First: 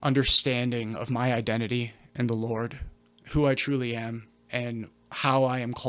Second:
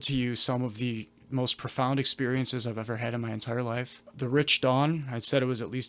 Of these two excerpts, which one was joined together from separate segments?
second; 1 cut; at 4.1 s

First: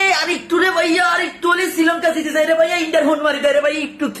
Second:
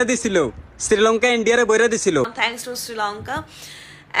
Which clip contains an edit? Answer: second; 1 cut; at 1.9 s

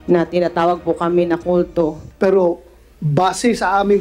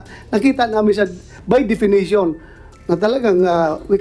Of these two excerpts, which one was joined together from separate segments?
first; 1 cut; at 2.0 s

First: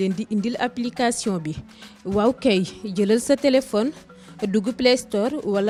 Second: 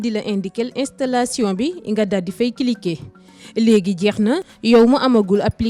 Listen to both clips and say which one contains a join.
second; 1 cut; at 4.5 s

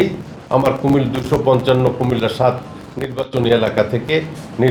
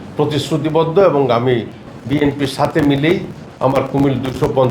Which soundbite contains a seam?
second; 1 cut; at 1.9 s

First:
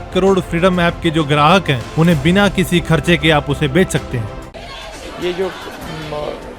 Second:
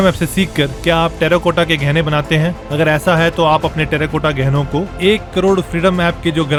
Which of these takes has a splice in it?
first; 1 cut; at 4.8 s

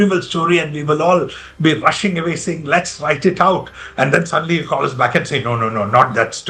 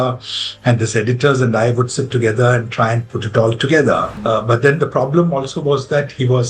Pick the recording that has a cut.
second; 1 cut; at 4.1 s

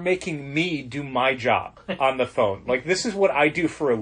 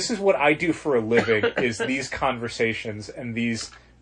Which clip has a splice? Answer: first; 1 cut; at 1.8 s

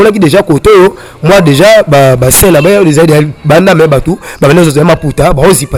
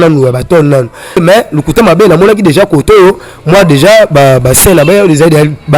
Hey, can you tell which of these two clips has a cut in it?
second; 1 cut; at 1.2 s

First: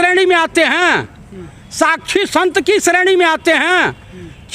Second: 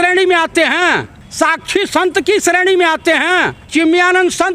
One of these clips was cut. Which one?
second; 2 cuts; at 1.2 s, 3.6 s

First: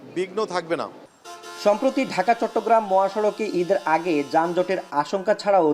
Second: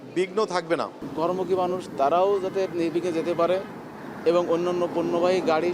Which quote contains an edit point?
second; 1 cut; at 1.1 s

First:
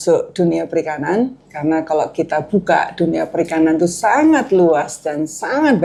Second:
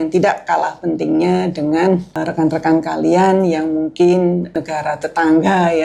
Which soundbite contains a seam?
second; 2 cuts; at 2.0 s, 4.5 s

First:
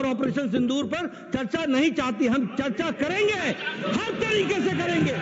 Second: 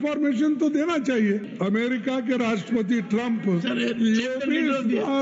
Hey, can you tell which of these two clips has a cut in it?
second; 1 cut; at 1.5 s

